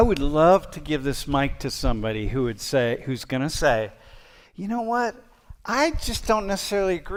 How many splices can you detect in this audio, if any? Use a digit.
0